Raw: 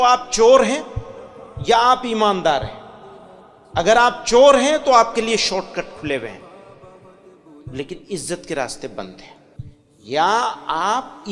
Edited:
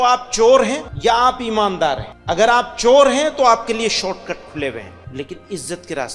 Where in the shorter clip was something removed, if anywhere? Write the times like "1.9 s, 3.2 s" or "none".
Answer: 0.9 s, 2.1 s, 5.0 s